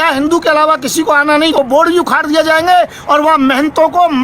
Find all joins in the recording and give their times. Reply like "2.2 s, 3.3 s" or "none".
1.6 s